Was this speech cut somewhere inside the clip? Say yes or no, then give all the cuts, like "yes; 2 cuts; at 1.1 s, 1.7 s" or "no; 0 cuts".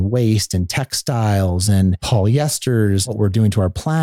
yes; 2 cuts; at 2.0 s, 3.0 s